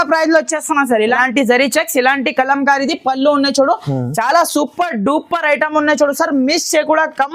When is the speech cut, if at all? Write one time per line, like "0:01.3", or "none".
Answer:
0:01.2